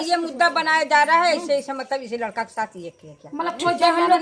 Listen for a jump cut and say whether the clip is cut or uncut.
uncut